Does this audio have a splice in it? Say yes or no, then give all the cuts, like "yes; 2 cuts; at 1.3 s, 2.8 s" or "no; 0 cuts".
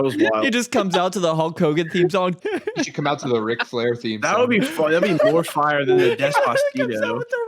yes; 1 cut; at 2.4 s